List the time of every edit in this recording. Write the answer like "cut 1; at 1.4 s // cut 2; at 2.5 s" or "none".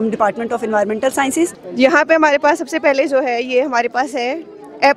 cut 1; at 1.6 s